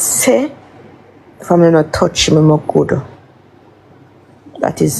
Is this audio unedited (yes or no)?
yes